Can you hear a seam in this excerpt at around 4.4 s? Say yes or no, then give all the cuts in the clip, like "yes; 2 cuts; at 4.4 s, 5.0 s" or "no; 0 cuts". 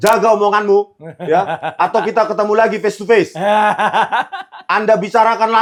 no; 0 cuts